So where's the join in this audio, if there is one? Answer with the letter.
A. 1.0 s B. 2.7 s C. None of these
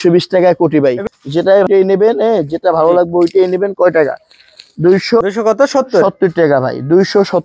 A